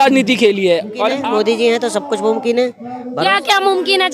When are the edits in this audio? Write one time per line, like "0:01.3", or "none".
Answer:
0:01.2